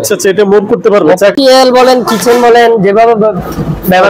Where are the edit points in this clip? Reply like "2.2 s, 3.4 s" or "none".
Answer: 1.3 s